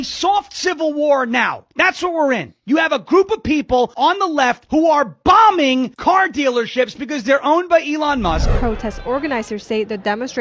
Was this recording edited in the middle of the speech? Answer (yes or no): yes